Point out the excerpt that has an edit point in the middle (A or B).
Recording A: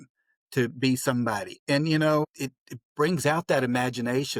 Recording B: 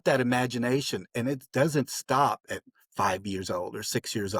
A